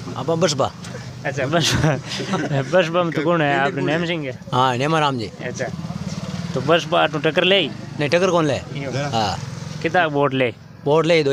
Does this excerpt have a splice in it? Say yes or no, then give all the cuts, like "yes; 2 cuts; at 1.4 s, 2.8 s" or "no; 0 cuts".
no; 0 cuts